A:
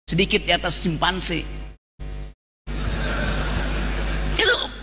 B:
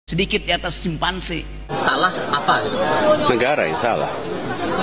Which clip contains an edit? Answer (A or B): B